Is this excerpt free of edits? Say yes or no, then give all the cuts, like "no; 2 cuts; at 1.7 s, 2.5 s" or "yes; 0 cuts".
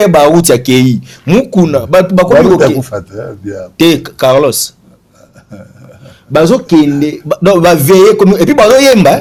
yes; 0 cuts